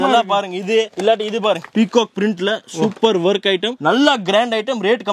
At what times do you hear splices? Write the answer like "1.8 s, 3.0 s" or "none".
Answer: none